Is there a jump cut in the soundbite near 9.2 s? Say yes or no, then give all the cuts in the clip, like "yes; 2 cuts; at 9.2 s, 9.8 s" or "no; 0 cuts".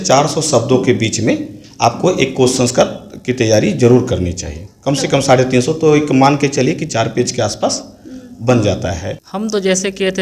yes; 1 cut; at 9.2 s